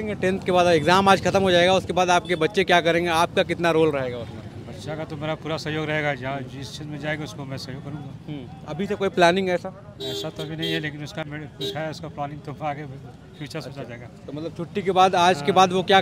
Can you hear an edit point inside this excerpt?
no; 0 cuts

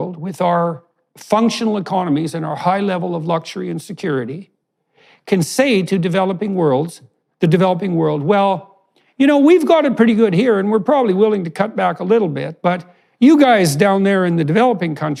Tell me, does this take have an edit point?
no; 0 cuts

